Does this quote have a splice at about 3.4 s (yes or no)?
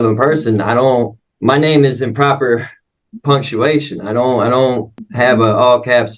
no